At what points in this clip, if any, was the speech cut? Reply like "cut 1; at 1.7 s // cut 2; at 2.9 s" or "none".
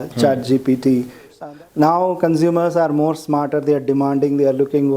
cut 1; at 1.3 s